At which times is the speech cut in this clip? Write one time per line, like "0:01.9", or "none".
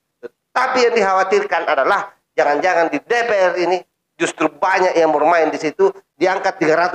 0:06.1